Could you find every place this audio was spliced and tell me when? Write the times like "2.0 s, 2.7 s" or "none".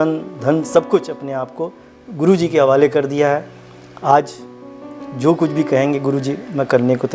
none